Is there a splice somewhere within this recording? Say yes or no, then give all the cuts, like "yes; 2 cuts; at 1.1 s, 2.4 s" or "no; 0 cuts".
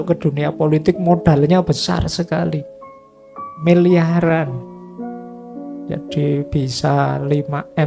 no; 0 cuts